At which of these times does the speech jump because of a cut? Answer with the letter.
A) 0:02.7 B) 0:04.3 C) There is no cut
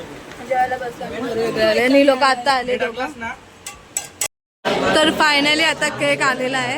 B